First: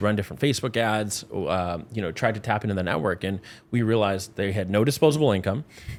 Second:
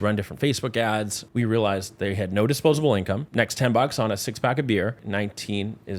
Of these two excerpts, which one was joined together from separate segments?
second; 3 cuts; at 1.2 s, 3.2 s, 5.0 s

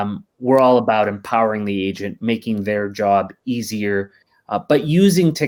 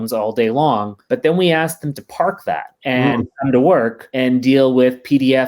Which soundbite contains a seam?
second; 3 cuts; at 0.9 s, 2.7 s, 4.0 s

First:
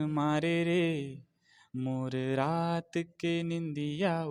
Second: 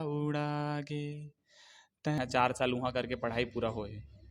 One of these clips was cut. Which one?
second; 1 cut; at 2.2 s

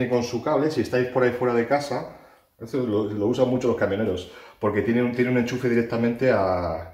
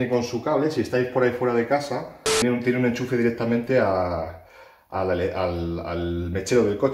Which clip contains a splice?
second; 1 cut; at 2.4 s

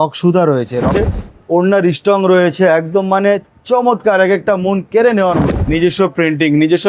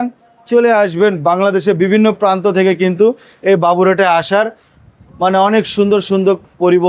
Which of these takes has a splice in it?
first; 2 cuts; at 1.1 s, 5.5 s

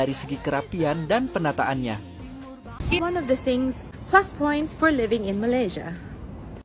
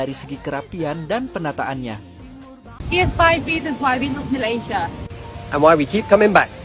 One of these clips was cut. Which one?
first; 1 cut; at 3.0 s

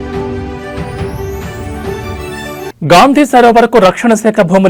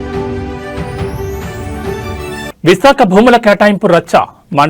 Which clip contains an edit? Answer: second; 1 cut; at 2.5 s

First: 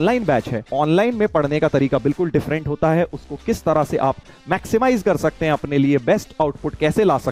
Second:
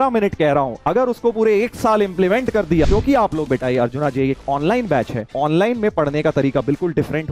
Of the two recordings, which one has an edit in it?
second; 1 cut; at 2.9 s

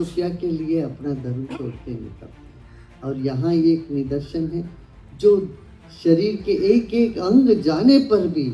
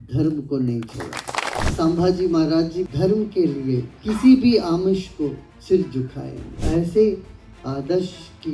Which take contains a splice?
second; 5 cuts; at 1.6 s, 2.8 s, 3.9 s, 5.5 s, 6.6 s

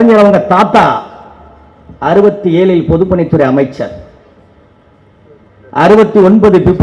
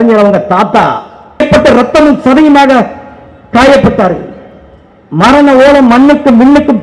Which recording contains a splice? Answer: second; 1 cut; at 1.4 s

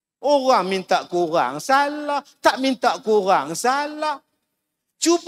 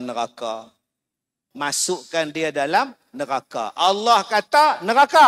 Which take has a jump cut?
second; 1 cut; at 1.4 s

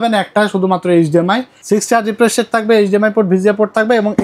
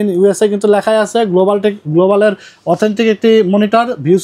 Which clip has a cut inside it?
first; 1 cut; at 1.5 s

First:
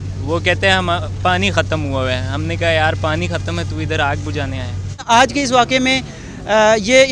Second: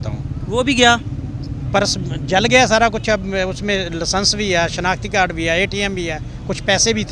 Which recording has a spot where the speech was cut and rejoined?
first; 1 cut; at 5.0 s

